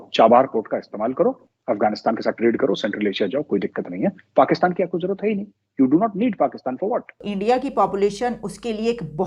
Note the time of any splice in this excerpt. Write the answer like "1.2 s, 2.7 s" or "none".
1.5 s, 7.3 s

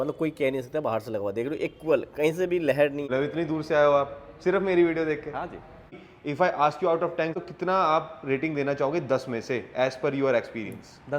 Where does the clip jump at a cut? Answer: 3.0 s, 6.1 s, 7.4 s

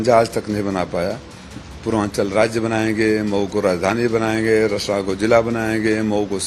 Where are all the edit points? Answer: none

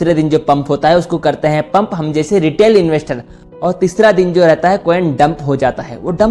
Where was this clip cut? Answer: none

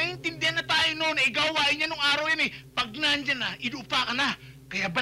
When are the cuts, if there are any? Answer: none

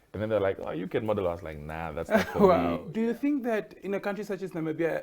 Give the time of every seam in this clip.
2.8 s

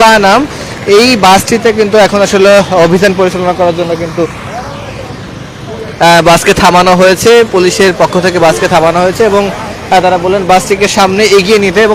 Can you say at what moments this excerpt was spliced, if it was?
none

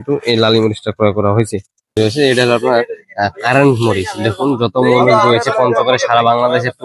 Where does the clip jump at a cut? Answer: 1.9 s

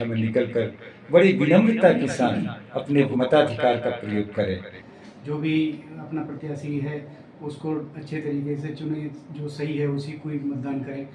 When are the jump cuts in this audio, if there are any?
3.1 s, 4.8 s

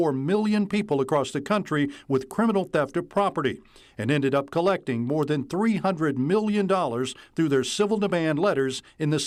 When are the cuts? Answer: none

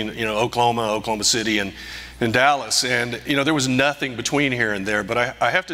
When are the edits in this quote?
none

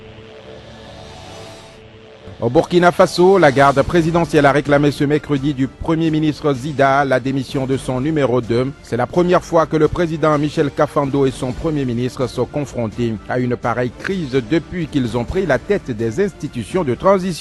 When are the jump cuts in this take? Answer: 0.9 s

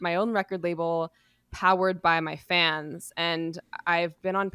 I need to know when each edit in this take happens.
none

